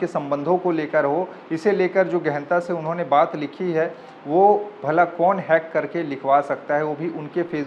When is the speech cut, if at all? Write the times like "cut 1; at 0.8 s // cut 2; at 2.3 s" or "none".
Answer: none

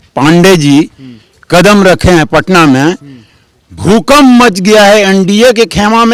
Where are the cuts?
none

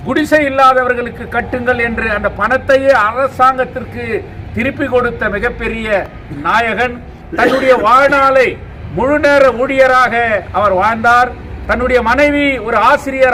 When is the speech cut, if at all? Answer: none

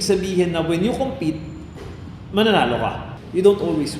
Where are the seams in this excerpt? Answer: cut 1; at 3.1 s

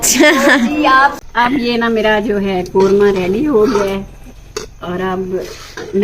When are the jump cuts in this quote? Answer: cut 1; at 1.2 s

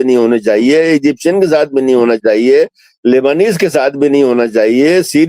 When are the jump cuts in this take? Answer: none

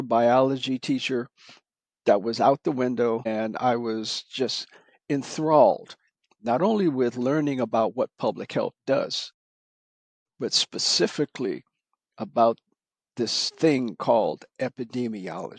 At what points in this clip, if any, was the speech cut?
none

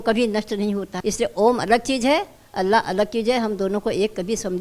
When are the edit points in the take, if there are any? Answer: cut 1; at 0.9 s

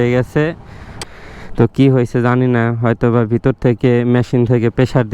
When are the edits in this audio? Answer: cut 1; at 1.0 s

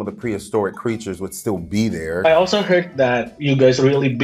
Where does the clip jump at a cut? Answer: cut 1; at 2.2 s // cut 2; at 3.3 s

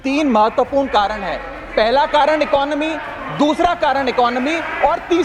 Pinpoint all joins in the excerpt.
none

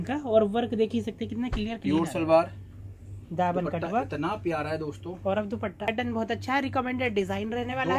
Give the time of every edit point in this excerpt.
cut 1; at 5.9 s

